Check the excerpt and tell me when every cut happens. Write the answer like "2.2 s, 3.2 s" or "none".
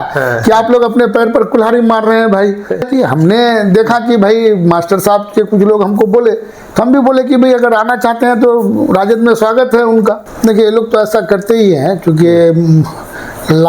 2.9 s, 10.3 s